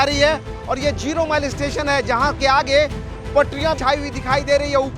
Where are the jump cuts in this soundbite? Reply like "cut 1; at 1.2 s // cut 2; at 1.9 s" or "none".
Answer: cut 1; at 3.8 s